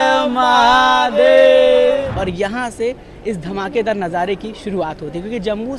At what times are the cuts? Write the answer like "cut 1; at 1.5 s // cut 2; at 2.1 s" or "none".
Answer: cut 1; at 2.1 s